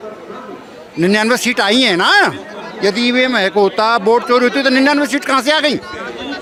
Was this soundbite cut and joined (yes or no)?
no